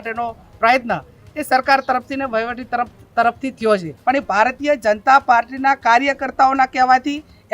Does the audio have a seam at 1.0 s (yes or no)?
no